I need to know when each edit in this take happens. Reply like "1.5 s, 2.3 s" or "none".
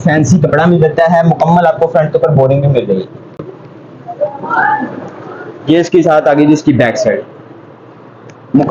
none